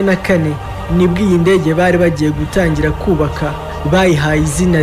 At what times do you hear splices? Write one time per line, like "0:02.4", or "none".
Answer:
none